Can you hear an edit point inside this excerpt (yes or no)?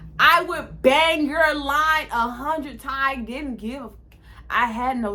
no